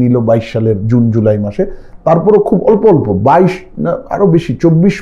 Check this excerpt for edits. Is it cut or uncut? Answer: uncut